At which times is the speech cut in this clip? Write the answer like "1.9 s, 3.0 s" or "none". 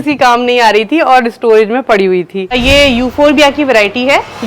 2.6 s